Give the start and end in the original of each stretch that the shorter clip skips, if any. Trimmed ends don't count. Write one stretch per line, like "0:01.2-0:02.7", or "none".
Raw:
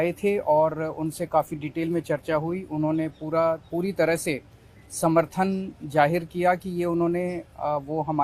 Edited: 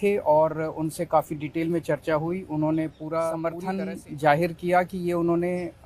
0:03.8-0:05.3